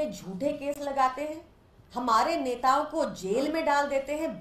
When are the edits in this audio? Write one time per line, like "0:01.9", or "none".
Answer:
none